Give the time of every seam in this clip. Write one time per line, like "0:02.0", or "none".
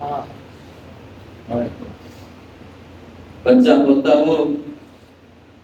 none